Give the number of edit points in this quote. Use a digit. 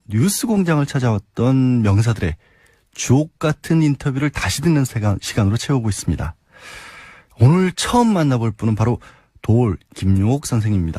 1